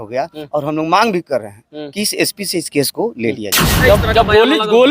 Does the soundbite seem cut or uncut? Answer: cut